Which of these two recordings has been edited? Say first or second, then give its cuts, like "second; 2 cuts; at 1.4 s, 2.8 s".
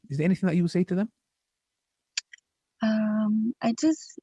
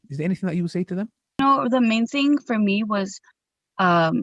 second; 1 cut; at 1.4 s